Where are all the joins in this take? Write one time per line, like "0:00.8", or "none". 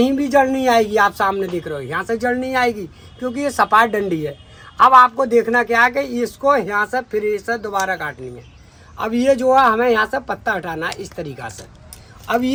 none